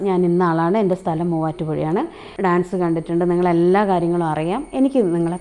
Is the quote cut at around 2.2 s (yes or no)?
yes